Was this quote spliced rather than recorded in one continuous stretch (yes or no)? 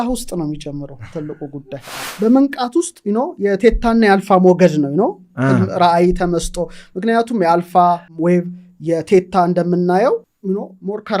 yes